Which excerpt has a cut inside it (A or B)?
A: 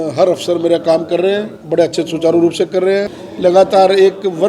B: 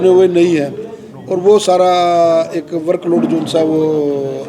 A